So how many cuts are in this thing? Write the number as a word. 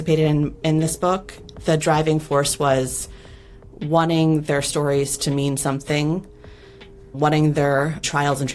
two